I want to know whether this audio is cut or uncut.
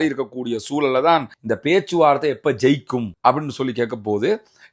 cut